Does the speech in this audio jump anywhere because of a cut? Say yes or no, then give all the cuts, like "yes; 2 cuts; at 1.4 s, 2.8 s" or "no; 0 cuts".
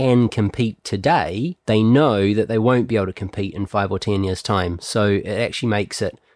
yes; 1 cut; at 1.6 s